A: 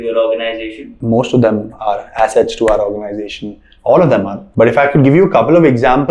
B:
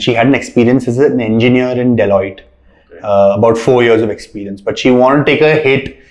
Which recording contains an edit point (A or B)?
A